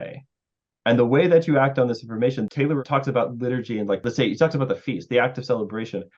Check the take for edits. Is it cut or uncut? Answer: cut